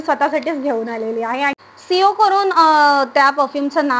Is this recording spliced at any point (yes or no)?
yes